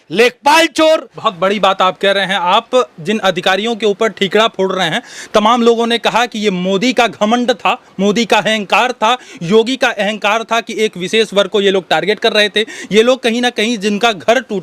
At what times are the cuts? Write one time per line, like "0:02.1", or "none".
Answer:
0:01.2